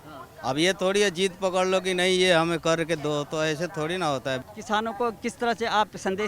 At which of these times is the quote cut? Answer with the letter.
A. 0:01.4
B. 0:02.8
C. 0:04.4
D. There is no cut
C